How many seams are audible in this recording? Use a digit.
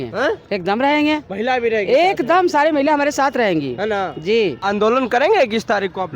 1